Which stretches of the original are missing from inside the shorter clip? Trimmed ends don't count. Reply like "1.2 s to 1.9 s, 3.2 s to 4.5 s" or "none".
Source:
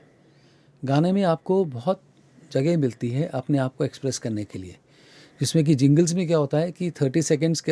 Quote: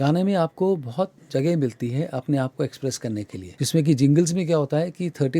2.1 s to 2.4 s, 4.6 s to 5.2 s